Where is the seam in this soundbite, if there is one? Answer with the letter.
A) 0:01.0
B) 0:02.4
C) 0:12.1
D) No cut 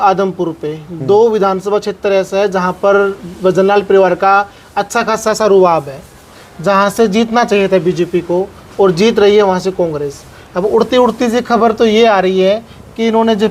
D